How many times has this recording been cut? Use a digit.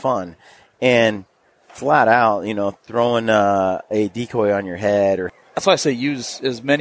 1